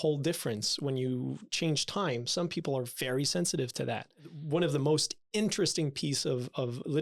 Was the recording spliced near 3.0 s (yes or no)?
no